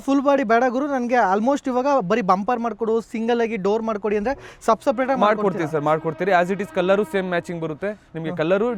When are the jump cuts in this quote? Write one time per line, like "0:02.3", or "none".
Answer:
none